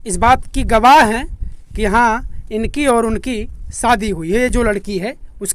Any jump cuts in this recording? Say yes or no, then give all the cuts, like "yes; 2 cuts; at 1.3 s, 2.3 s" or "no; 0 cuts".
no; 0 cuts